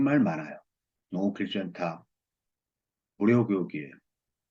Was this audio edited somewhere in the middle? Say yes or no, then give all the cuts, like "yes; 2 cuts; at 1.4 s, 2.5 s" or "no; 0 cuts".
no; 0 cuts